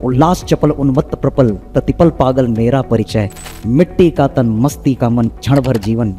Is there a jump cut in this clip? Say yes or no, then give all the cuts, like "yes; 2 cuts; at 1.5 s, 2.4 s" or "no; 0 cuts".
no; 0 cuts